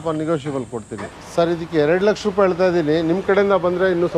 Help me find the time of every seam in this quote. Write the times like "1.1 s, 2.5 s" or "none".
1.2 s